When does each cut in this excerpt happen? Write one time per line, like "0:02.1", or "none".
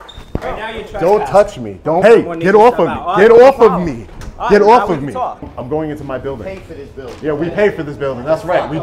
0:02.0
0:05.5

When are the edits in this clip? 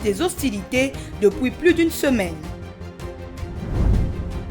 0:02.4

